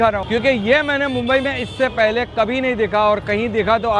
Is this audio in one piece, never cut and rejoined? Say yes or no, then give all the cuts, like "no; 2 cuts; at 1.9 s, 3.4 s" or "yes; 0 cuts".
yes; 0 cuts